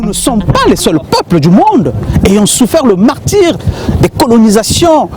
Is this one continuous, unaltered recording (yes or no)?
yes